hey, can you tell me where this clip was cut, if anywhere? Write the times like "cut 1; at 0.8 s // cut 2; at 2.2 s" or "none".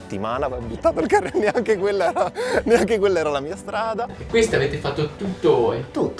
cut 1; at 4.1 s